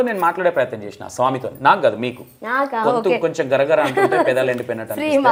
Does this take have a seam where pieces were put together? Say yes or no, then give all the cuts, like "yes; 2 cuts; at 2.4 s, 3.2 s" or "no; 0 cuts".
no; 0 cuts